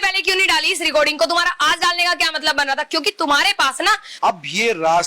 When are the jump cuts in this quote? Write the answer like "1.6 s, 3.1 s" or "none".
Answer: 4.1 s